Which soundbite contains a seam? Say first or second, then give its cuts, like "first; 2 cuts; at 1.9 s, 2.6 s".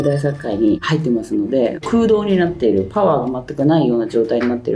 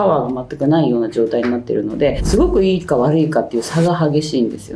first; 1 cut; at 1.8 s